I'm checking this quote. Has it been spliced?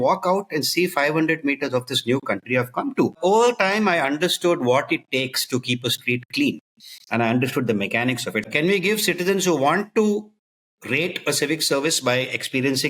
yes; 2 cuts; at 3.2 s, 8.5 s

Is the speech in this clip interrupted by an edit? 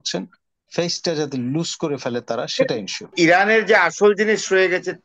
yes; 1 cut; at 3.1 s

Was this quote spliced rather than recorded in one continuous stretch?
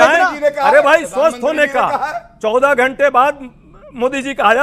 no; 0 cuts

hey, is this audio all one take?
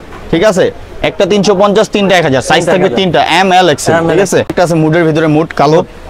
yes; 0 cuts

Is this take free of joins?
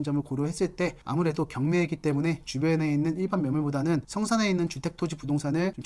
yes; 0 cuts

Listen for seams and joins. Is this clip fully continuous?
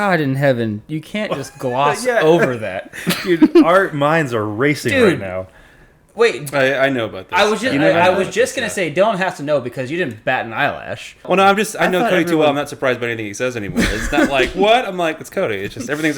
no; 1 cut; at 11.3 s

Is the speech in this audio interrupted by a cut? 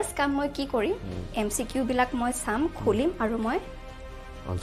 no; 0 cuts

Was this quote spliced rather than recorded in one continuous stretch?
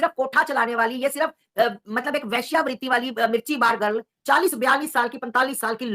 yes; 1 cut; at 4.1 s

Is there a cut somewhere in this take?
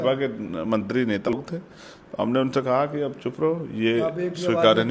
yes; 1 cut; at 1.3 s

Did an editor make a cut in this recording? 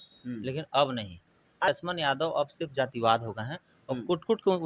yes; 1 cut; at 1.7 s

